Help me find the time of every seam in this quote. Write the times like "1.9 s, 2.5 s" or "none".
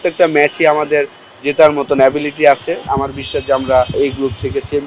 2.8 s, 4.0 s